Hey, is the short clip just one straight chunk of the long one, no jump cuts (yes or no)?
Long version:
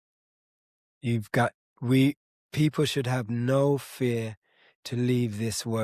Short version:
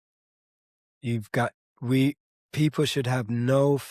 yes